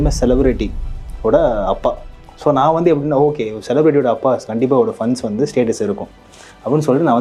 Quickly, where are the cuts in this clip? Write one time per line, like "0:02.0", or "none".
none